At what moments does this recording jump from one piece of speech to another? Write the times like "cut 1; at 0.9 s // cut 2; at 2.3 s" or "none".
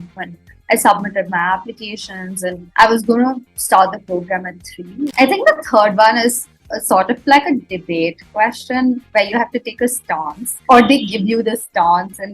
cut 1; at 5.1 s